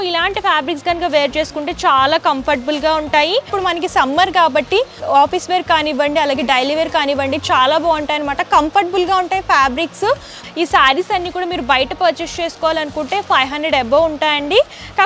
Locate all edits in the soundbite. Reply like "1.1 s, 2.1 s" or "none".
3.5 s, 10.4 s